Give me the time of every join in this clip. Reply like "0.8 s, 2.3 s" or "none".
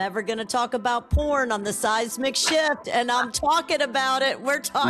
none